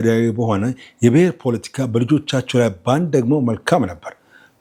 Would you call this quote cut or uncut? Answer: uncut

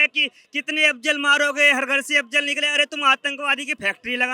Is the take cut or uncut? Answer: uncut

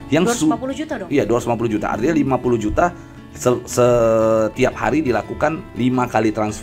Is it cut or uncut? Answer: uncut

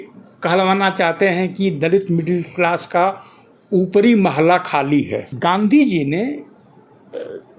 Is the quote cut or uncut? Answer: cut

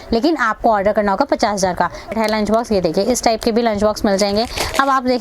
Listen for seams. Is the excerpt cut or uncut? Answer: cut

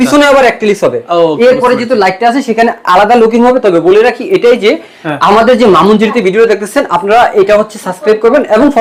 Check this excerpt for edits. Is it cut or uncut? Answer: uncut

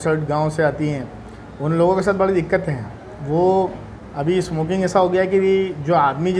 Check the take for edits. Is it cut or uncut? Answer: uncut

